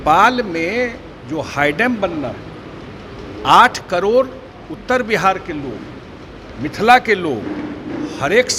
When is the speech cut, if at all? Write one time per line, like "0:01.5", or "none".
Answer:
none